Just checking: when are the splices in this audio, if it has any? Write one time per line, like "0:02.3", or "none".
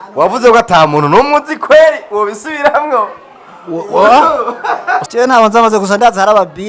0:05.0